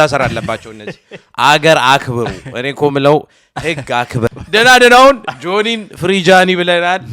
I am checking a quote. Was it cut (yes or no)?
yes